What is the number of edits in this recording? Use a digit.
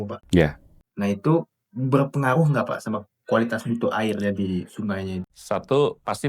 1